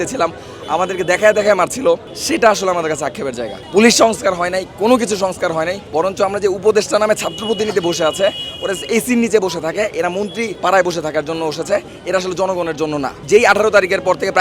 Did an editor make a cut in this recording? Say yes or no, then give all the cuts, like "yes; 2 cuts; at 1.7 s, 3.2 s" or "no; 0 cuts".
yes; 5 cuts; at 2.1 s, 3.5 s, 5.8 s, 10.5 s, 13.2 s